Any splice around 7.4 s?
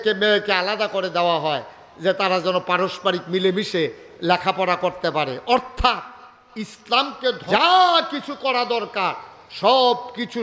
yes; 1 cut; at 7.4 s

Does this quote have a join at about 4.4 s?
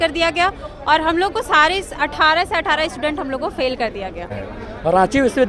yes; 1 cut; at 4.4 s

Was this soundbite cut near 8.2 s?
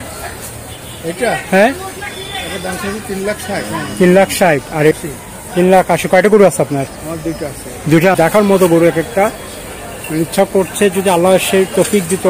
yes; 2 cuts; at 5.0 s, 8.2 s

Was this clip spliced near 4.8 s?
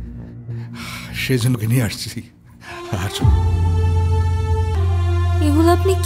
yes; 1 cut; at 4.8 s

